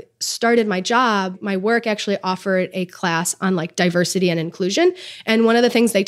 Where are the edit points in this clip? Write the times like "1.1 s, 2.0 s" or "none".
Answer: 1.4 s